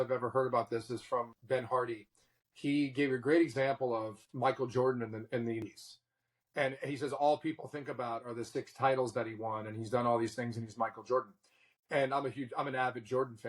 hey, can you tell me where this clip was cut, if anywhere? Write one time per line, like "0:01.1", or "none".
0:01.4
0:05.6